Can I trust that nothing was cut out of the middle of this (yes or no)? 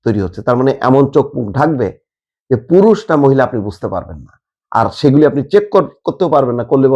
yes